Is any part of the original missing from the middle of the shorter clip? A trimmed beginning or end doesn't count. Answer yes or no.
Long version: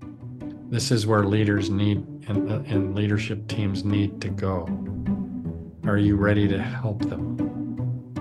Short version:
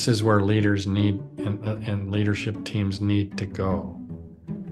no